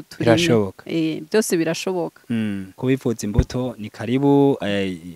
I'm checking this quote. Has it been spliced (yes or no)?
yes